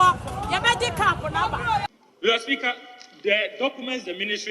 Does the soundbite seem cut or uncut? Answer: cut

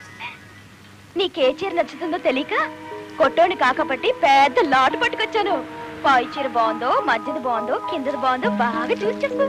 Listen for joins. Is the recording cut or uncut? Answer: uncut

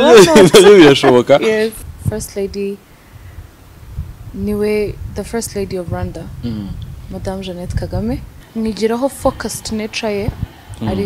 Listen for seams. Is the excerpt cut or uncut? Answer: cut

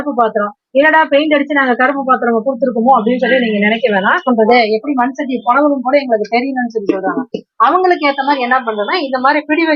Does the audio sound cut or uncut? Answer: cut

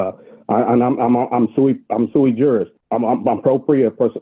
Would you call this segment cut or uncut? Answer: cut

